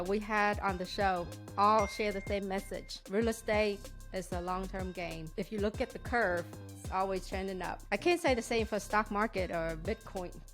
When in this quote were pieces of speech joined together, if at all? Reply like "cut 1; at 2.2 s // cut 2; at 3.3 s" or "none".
cut 1; at 3.0 s // cut 2; at 5.2 s // cut 3; at 7.8 s

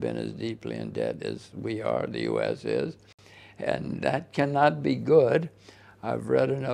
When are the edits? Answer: none

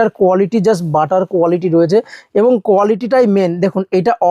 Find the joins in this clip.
none

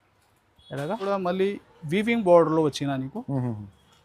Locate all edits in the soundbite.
cut 1; at 1.1 s

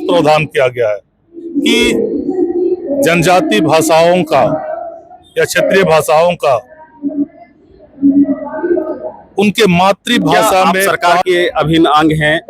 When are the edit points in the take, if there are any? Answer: cut 1; at 2.9 s // cut 2; at 10.9 s

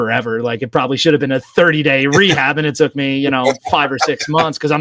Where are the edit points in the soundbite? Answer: none

